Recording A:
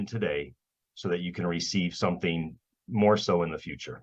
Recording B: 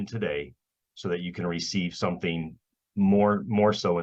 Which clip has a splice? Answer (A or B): A